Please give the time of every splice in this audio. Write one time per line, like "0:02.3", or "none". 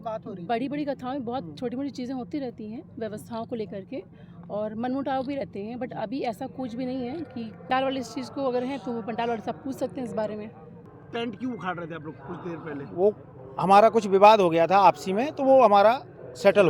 0:07.7
0:10.8